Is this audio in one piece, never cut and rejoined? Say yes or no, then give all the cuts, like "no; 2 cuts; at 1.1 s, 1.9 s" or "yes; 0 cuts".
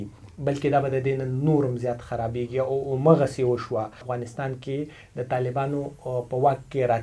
no; 1 cut; at 4.1 s